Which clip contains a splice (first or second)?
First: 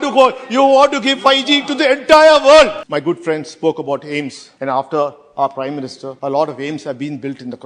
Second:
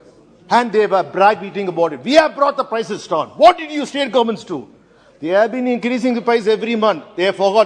first